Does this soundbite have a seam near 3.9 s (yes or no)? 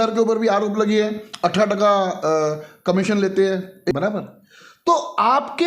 yes